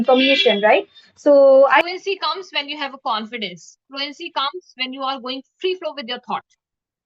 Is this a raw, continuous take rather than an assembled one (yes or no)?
no